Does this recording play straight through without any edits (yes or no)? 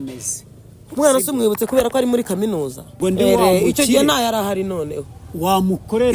no